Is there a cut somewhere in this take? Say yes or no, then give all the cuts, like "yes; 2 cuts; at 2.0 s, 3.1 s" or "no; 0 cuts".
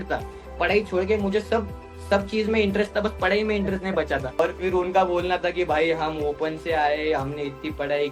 no; 0 cuts